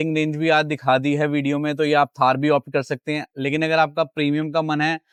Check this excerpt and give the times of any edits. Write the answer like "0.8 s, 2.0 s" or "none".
none